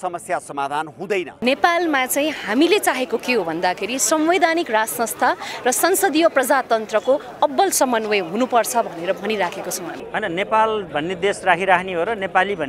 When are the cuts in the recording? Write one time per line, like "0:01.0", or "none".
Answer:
0:01.3
0:09.9